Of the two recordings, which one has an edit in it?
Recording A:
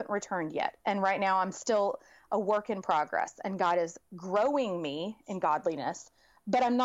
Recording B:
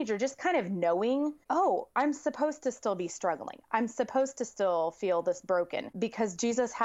B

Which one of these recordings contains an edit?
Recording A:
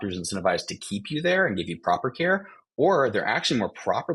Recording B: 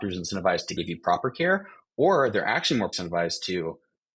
B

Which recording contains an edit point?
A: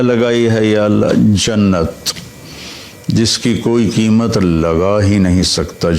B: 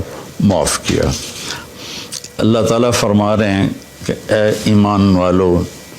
B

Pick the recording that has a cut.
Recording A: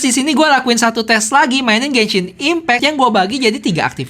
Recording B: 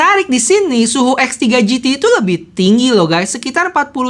A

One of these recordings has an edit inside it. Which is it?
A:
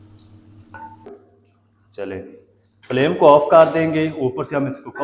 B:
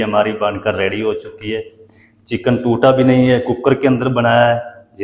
A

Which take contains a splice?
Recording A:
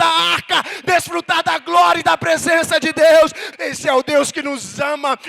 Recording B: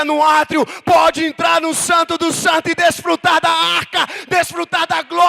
A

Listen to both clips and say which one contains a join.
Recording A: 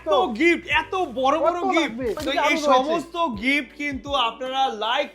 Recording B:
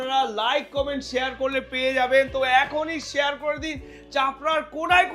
A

